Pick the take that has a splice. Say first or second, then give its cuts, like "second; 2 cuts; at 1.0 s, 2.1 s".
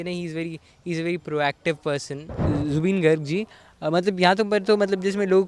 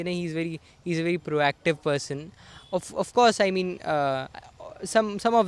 first; 1 cut; at 2.4 s